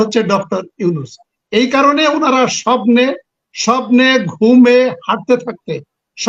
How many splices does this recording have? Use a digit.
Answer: 0